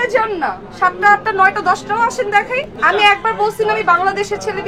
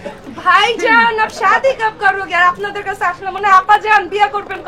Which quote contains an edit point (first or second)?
first